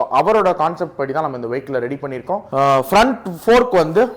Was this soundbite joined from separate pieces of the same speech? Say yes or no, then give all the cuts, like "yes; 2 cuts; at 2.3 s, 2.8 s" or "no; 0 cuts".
yes; 1 cut; at 2.5 s